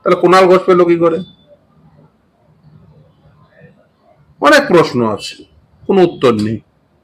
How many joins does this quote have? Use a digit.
0